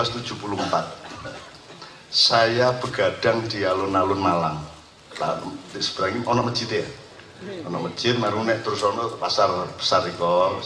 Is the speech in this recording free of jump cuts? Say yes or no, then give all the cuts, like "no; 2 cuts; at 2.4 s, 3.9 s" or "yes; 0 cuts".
yes; 0 cuts